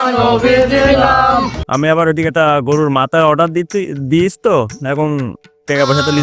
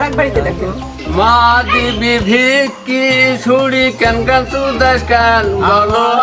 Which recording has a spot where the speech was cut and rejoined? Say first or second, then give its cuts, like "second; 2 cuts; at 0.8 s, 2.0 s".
first; 1 cut; at 1.6 s